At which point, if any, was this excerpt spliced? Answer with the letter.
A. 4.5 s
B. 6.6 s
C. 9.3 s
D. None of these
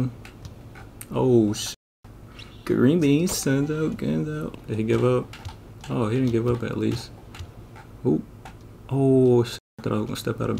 A